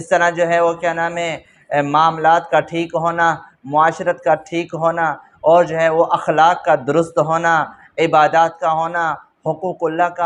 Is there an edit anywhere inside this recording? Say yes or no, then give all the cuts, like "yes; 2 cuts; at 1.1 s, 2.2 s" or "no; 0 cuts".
no; 0 cuts